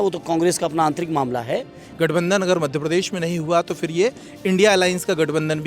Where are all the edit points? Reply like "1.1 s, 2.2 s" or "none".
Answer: 1.8 s